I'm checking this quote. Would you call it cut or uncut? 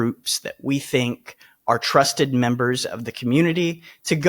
uncut